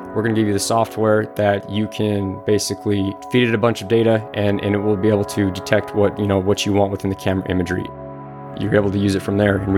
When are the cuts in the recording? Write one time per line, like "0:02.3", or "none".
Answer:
0:03.2
0:08.3